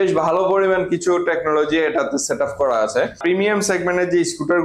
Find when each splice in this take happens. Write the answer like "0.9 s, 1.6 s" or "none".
3.2 s

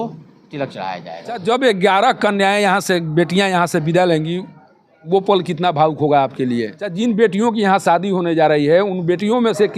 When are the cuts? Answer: 1.4 s, 6.8 s

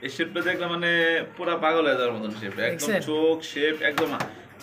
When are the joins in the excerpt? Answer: none

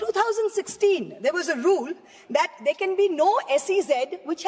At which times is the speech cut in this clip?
none

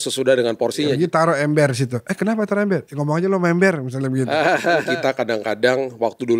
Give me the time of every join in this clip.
0.9 s, 4.9 s

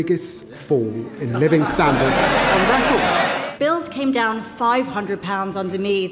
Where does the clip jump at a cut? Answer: 3.4 s

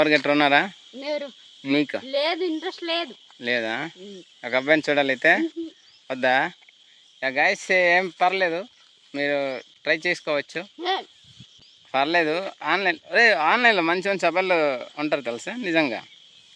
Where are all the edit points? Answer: none

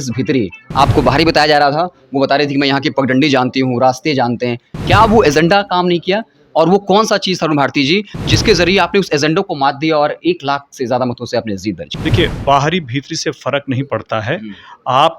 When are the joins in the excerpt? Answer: 8.2 s, 11.9 s

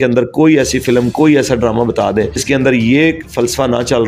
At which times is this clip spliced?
2.4 s

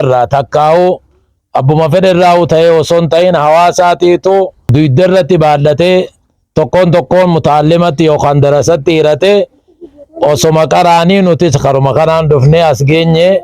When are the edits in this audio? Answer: 4.7 s

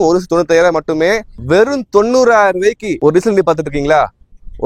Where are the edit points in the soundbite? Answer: 1.3 s

